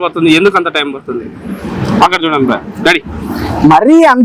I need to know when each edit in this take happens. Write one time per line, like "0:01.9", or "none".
none